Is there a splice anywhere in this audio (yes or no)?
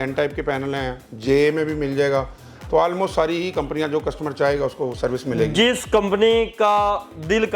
no